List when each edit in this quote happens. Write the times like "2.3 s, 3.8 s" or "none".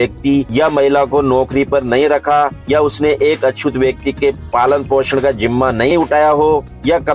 5.9 s